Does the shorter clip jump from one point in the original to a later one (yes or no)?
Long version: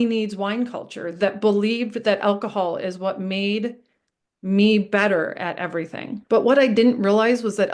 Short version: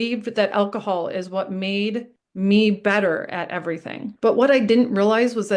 yes